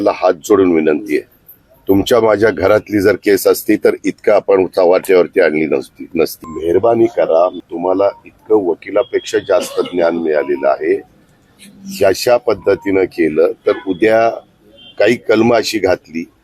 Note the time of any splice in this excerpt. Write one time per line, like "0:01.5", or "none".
0:06.5
0:07.7